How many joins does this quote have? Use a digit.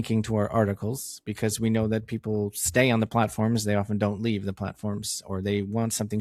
0